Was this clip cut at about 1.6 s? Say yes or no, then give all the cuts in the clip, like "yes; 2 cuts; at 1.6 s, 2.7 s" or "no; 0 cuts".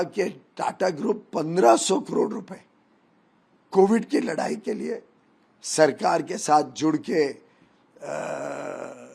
no; 0 cuts